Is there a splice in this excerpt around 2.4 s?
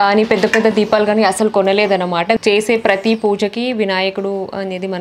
yes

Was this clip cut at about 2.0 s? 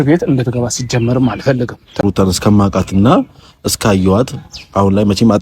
yes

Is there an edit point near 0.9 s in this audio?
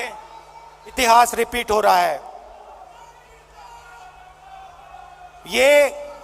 yes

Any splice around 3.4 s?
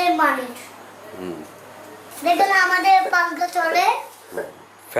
no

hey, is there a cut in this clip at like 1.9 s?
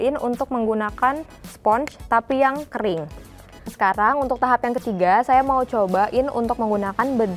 no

